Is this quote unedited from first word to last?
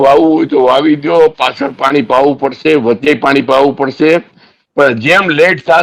yes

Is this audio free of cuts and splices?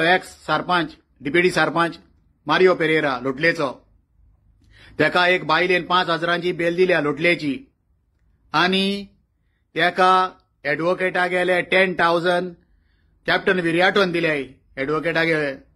yes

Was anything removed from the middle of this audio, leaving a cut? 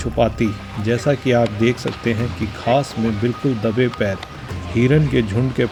no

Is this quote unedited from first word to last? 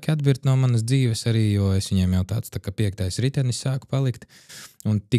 yes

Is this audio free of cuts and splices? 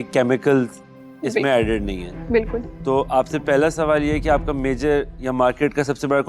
yes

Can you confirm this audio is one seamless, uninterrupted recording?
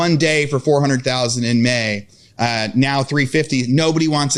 yes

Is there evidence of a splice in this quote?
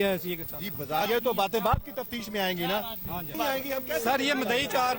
yes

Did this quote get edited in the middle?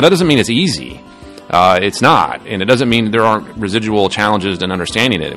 no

